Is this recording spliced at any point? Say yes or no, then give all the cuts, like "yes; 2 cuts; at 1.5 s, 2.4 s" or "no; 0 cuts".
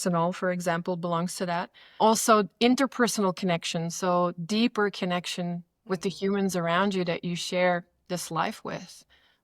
yes; 1 cut; at 2.0 s